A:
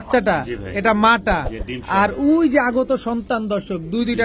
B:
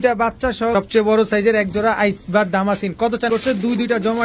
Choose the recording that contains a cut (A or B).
B